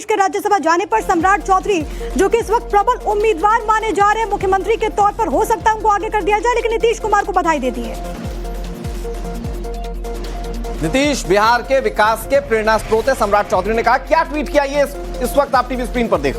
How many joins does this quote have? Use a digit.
1